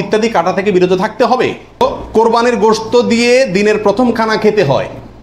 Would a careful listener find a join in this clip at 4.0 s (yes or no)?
no